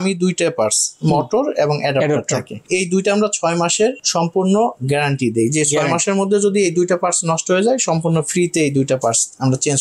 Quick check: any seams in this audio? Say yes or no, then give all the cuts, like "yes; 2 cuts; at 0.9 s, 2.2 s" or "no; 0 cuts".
no; 0 cuts